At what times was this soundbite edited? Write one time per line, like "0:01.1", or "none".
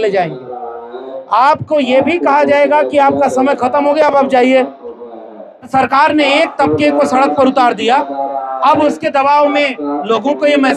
0:05.7